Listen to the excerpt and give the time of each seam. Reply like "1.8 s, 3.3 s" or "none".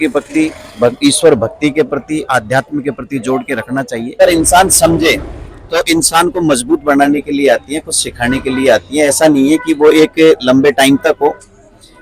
4.2 s